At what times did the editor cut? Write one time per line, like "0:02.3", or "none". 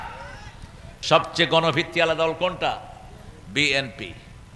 0:01.0